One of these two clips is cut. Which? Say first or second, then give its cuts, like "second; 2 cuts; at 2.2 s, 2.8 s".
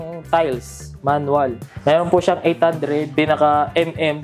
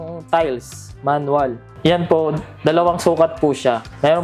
first; 2 cuts; at 1.7 s, 3.1 s